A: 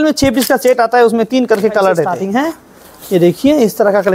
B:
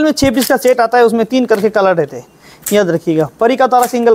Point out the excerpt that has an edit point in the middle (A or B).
A